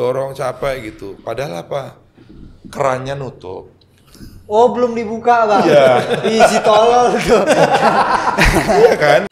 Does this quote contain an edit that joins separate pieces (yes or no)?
no